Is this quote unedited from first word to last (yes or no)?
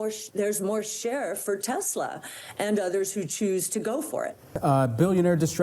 no